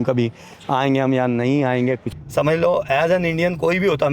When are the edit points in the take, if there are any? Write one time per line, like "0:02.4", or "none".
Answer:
0:02.1